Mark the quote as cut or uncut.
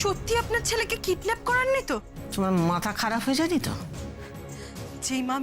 cut